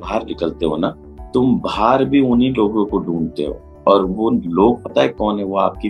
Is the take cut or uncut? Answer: cut